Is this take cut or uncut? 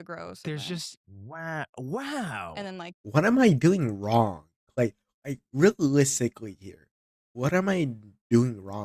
cut